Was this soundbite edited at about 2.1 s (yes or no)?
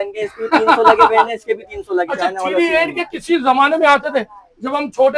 yes